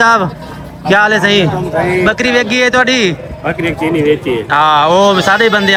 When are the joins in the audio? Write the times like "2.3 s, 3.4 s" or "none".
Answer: none